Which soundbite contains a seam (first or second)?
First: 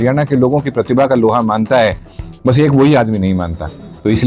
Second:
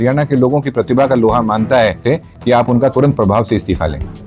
second